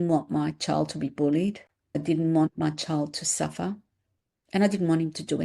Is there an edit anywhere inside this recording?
yes; 1 cut; at 2.0 s

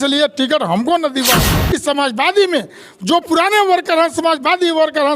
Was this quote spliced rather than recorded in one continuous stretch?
yes; 1 cut; at 1.5 s

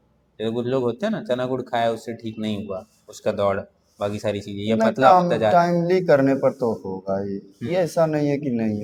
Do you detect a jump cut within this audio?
no; 0 cuts

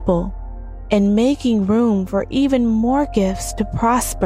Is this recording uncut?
yes; 0 cuts

